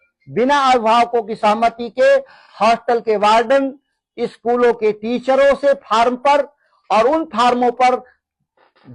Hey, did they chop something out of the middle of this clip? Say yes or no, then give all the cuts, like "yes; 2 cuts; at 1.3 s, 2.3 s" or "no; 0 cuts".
no; 0 cuts